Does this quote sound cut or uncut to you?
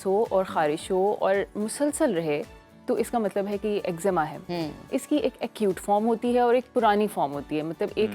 uncut